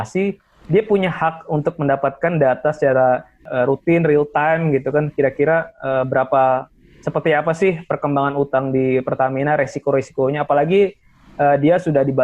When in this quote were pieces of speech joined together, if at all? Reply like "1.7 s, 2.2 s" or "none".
3.4 s